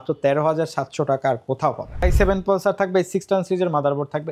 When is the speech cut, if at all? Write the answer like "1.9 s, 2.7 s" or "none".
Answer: 2.0 s